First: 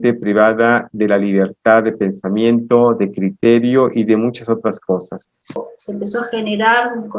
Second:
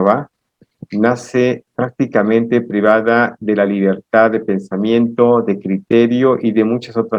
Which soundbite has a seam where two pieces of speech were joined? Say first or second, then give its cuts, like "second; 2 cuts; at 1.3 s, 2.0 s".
first; 1 cut; at 5.6 s